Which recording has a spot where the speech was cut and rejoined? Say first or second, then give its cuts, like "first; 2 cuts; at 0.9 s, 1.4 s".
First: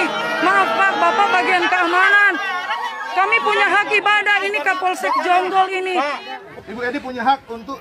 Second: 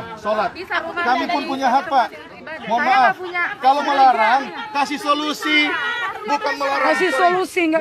first; 1 cut; at 6.5 s